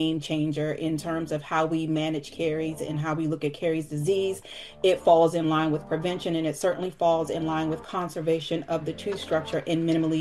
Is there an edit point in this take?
no; 0 cuts

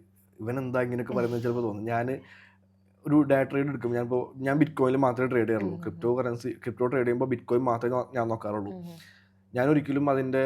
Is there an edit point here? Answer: no; 0 cuts

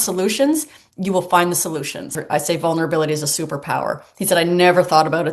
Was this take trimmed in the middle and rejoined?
yes; 1 cut; at 2.2 s

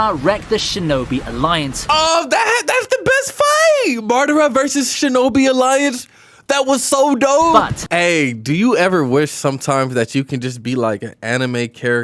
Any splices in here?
yes; 1 cut; at 7.8 s

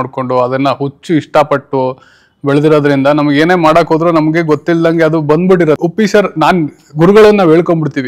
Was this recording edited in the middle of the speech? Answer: yes; 1 cut; at 5.8 s

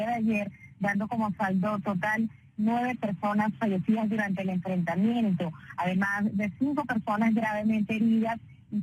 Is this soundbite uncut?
yes; 0 cuts

